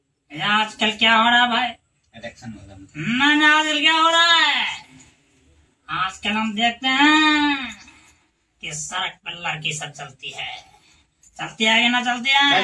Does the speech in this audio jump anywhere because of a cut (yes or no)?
no